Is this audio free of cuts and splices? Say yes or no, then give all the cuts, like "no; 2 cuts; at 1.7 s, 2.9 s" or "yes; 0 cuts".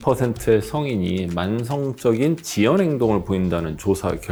yes; 0 cuts